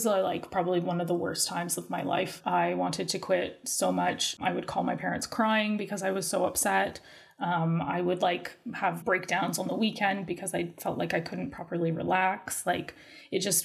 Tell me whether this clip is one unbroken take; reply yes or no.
no